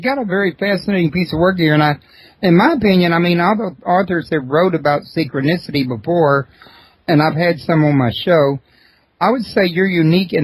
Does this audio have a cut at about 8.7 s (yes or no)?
no